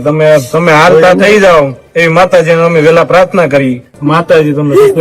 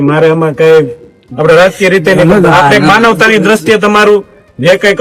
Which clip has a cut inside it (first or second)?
first